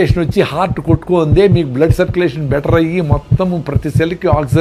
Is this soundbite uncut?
yes; 0 cuts

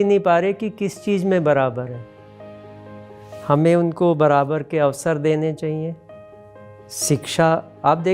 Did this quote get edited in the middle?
no; 0 cuts

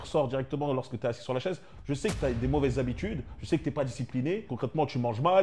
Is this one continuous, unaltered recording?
no; 1 cut; at 4.5 s

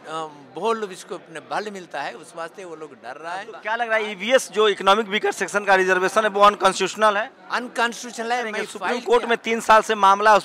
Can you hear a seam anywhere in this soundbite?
yes; 2 cuts; at 3.5 s, 8.8 s

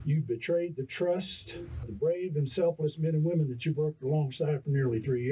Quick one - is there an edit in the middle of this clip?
yes; 1 cut; at 1.9 s

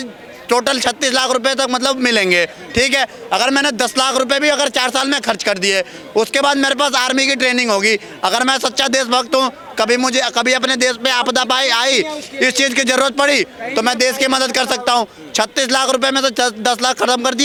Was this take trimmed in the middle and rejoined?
no; 0 cuts

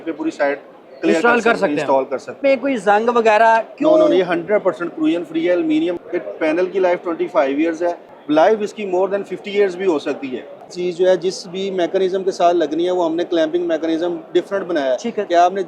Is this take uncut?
no; 4 cuts; at 2.3 s, 5.9 s, 8.1 s, 10.7 s

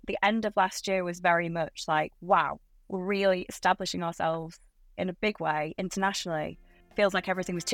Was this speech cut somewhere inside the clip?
yes; 1 cut; at 6.8 s

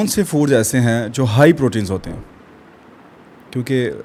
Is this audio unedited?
yes; 0 cuts

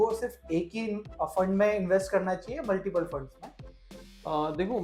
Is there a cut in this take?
no; 0 cuts

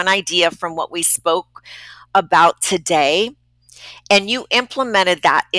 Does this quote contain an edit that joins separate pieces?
no; 0 cuts

